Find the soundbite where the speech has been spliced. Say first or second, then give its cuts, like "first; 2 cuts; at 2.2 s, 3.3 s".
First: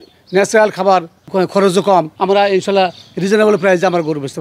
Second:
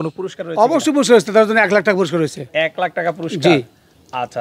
first; 2 cuts; at 1.2 s, 2.1 s